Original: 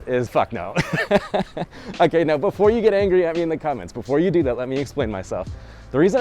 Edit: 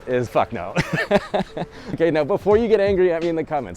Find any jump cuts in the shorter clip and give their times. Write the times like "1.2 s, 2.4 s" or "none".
2.0 s